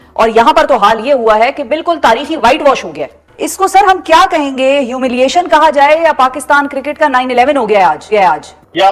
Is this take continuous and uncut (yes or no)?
yes